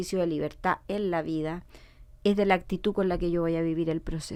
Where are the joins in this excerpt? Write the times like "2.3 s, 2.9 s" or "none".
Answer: none